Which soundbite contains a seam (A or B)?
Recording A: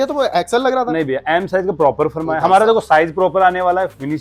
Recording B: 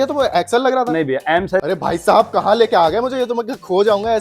B